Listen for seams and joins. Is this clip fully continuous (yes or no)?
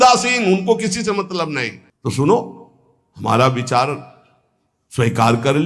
yes